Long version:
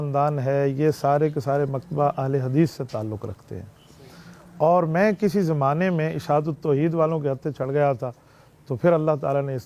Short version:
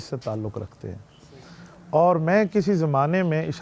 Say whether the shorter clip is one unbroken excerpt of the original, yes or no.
yes